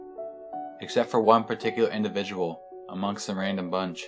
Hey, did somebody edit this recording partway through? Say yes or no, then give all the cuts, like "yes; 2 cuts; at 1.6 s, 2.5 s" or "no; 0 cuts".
yes; 1 cut; at 1.1 s